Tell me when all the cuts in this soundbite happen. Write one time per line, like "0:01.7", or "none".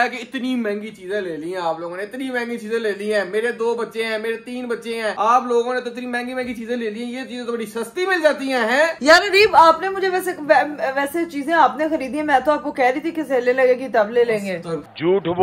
none